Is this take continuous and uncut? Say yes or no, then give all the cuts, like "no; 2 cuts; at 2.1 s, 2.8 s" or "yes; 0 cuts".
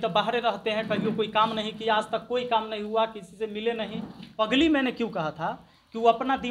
no; 1 cut; at 4.3 s